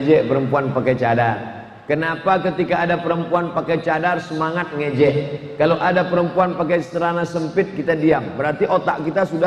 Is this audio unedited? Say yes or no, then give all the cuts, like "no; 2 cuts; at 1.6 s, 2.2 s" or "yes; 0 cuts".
yes; 0 cuts